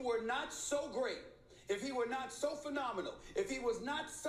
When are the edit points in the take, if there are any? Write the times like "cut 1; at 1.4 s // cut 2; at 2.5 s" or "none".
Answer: none